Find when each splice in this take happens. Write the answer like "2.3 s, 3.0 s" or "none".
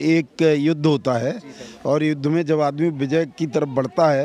none